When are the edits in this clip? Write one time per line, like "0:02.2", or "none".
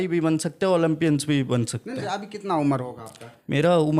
0:02.1

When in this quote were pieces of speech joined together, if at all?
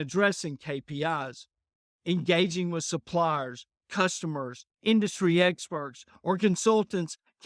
none

